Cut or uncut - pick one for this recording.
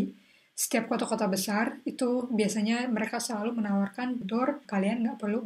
cut